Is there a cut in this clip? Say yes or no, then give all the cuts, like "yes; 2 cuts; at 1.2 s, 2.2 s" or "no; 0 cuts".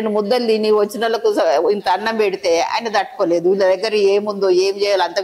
no; 0 cuts